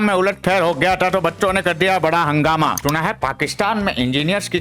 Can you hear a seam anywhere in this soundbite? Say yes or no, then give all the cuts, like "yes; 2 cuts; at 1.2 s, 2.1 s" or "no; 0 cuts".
yes; 1 cut; at 2.7 s